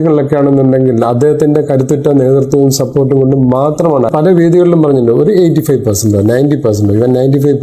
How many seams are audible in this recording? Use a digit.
1